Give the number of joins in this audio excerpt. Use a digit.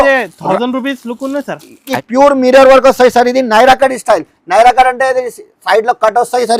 1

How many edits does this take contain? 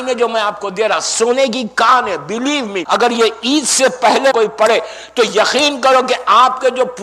2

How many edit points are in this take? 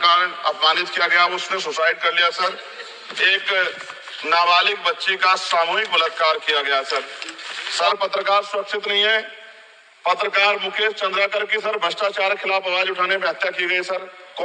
2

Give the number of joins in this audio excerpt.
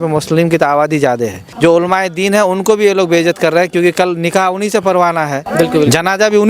2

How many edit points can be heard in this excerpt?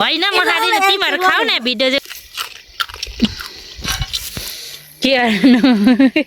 1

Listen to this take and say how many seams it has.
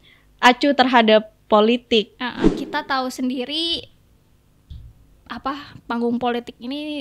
1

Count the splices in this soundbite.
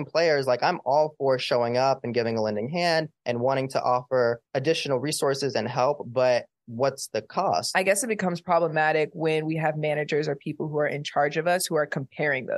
3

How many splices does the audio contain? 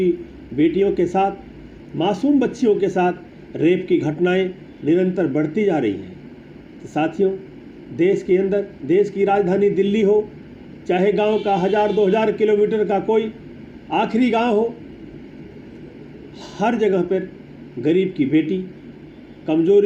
0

